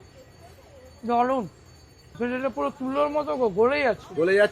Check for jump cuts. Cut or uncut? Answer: cut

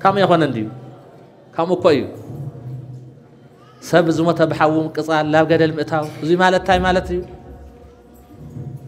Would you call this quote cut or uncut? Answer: uncut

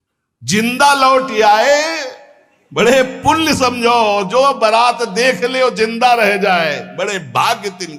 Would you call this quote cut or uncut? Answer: uncut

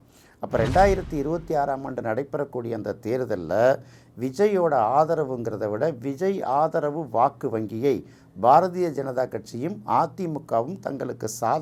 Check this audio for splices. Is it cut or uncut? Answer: uncut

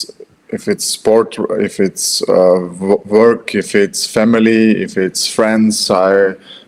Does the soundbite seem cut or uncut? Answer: uncut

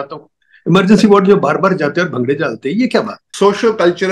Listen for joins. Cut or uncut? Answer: cut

